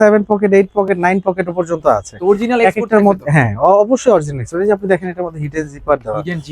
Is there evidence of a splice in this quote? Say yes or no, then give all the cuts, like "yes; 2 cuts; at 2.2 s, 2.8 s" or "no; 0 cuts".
no; 0 cuts